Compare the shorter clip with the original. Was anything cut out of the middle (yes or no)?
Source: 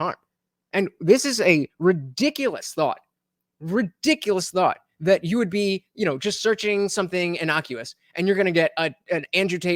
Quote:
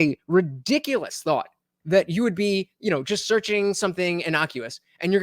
yes